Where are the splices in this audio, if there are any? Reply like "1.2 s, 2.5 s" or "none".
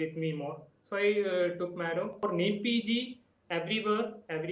2.2 s